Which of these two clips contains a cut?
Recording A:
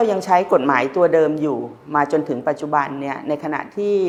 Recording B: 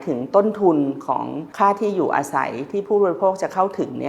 B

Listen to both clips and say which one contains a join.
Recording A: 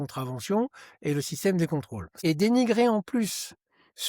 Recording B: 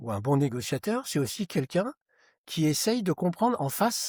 A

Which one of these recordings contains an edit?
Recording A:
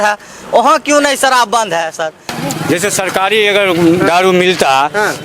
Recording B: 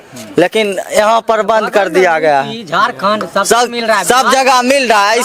A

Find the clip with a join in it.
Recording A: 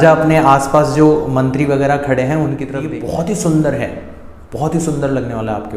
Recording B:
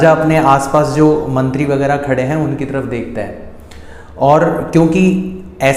A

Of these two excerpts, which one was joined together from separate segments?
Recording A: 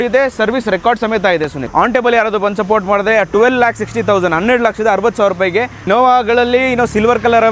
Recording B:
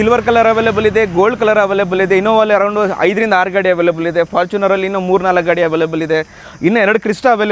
A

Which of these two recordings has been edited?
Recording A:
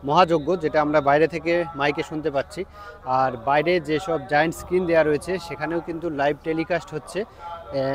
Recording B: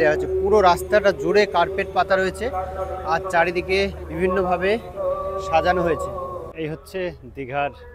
B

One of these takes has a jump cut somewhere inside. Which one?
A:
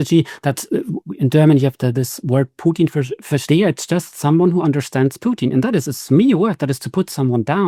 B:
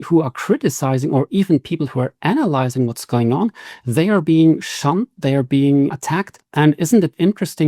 B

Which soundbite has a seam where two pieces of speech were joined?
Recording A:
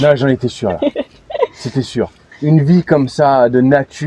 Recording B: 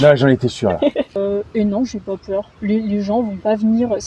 B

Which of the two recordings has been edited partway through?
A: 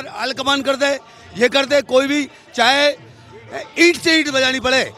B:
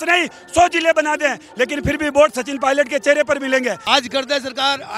B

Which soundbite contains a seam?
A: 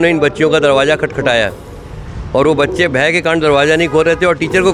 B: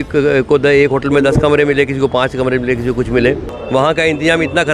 B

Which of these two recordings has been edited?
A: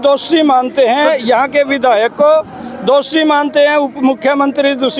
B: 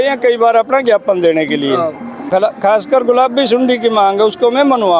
B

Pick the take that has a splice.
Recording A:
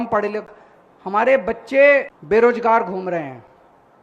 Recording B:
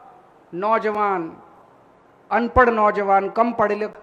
A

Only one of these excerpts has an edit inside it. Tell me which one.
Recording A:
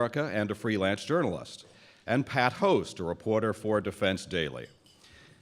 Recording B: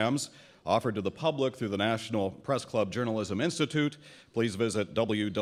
A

